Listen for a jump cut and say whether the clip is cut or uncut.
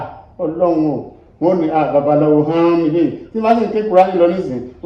uncut